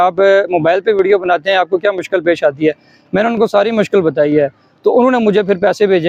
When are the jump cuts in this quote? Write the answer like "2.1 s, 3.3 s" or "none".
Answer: none